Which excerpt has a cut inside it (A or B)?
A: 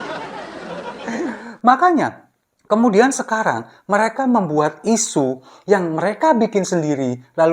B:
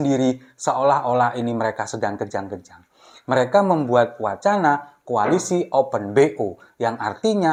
A